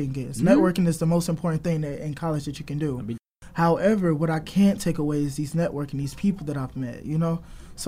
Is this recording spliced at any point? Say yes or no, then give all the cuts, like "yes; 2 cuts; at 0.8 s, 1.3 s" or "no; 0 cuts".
yes; 1 cut; at 3.2 s